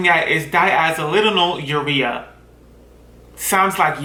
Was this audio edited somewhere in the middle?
no; 0 cuts

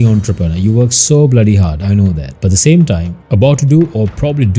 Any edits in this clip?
yes; 1 cut; at 3.2 s

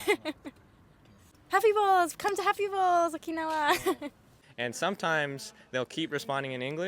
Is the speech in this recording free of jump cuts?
no; 2 cuts; at 1.3 s, 4.2 s

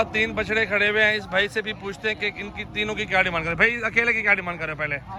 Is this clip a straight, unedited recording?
yes; 0 cuts

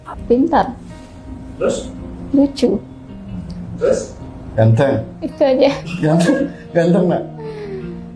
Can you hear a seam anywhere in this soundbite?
no; 0 cuts

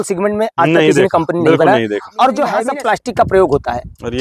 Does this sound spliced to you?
yes; 1 cut; at 2.6 s

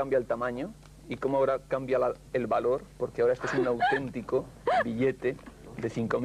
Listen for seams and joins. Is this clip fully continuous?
no; 1 cut; at 2.6 s

